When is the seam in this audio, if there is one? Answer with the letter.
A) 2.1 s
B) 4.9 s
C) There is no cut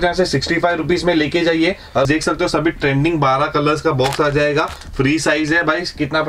A